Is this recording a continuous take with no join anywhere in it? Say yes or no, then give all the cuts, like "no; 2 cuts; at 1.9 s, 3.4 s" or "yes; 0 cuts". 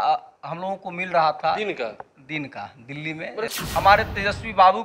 no; 1 cut; at 3.5 s